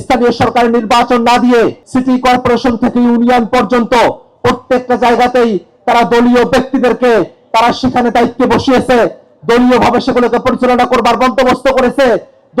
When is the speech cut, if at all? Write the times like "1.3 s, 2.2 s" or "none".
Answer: 1.8 s